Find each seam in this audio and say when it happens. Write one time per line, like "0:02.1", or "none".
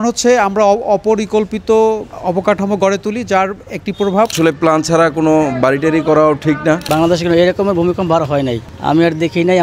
0:04.3
0:06.8